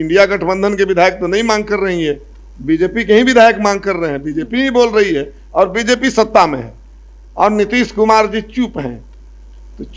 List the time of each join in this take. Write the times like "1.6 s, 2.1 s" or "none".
none

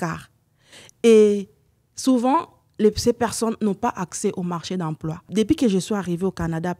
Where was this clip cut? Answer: 5.2 s

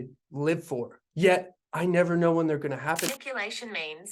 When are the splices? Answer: 3.1 s

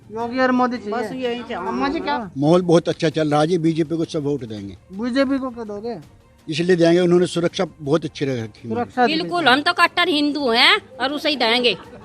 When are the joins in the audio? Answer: 2.1 s, 8.9 s

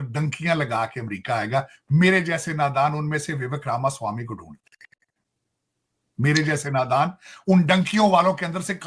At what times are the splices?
none

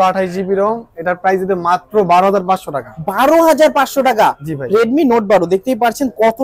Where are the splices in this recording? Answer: none

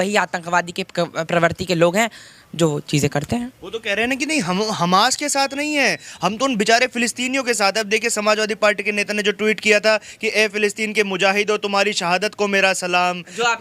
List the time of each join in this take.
none

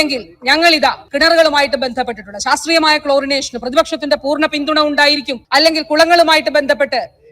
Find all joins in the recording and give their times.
1.0 s, 5.3 s

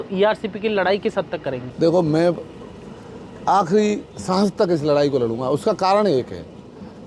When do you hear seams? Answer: none

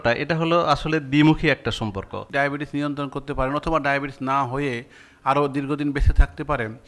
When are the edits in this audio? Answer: 2.3 s

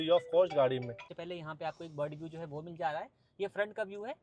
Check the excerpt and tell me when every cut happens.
1.1 s

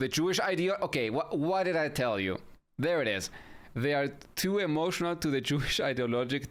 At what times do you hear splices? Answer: none

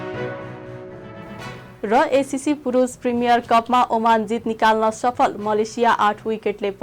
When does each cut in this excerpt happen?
0.9 s

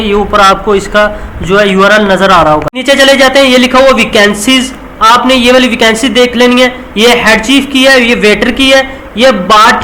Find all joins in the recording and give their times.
2.8 s

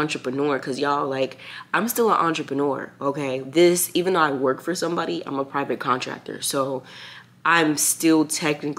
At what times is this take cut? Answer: none

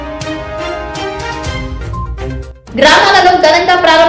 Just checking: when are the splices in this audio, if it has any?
2.5 s

